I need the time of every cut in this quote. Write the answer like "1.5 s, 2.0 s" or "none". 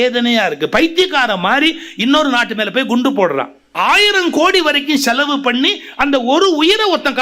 3.6 s

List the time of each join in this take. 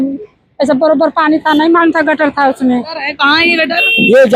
3.0 s

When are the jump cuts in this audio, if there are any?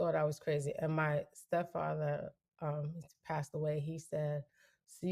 none

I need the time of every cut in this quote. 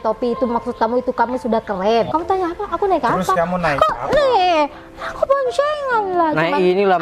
2.1 s

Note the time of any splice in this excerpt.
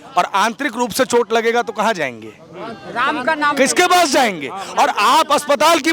none

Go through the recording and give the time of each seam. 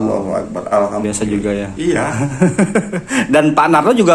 1.0 s

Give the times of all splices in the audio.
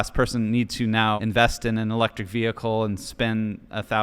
1.2 s

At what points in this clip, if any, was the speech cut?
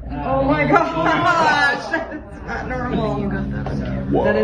none

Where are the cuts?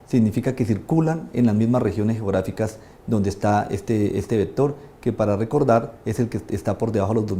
6.0 s

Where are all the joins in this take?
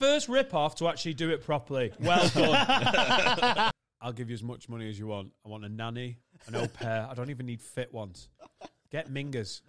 3.7 s

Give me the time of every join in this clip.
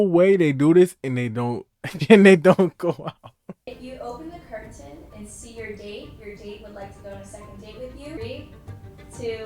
3.8 s, 8.2 s

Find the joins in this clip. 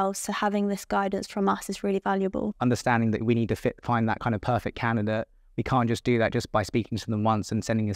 2.5 s

